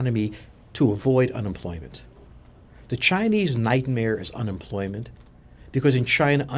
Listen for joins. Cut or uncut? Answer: uncut